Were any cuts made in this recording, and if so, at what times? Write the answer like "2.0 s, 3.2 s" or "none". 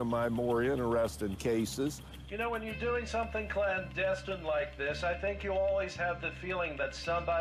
2.1 s